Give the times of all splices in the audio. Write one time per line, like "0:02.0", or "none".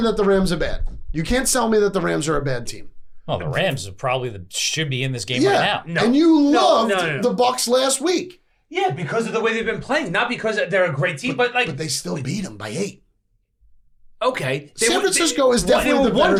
none